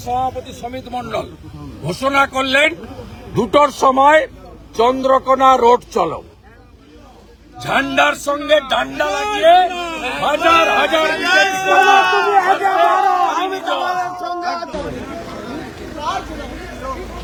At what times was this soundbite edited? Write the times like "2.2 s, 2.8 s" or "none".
none